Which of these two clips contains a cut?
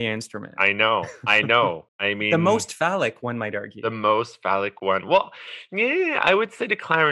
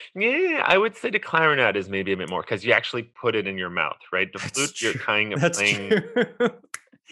first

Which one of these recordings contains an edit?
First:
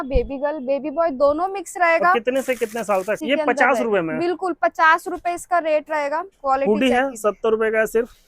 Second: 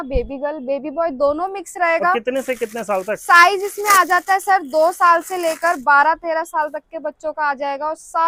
first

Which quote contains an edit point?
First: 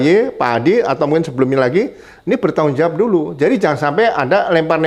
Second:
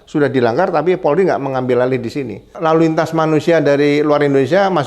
second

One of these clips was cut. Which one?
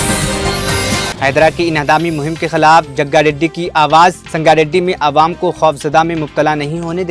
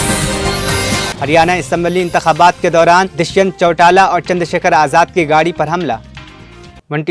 first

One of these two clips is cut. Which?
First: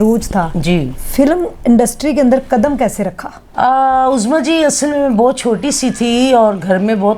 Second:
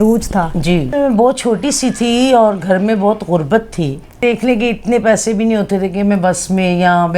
second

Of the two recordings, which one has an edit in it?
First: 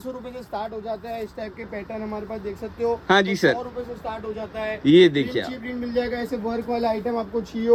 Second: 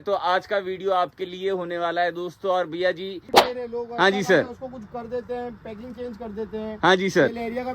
second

